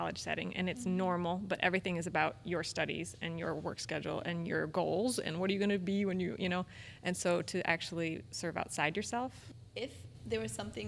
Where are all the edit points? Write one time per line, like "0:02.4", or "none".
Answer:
0:09.5